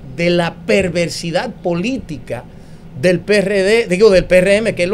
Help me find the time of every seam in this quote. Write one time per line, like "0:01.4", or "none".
none